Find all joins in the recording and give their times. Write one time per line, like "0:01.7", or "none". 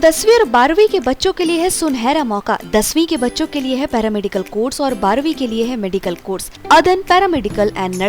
0:06.6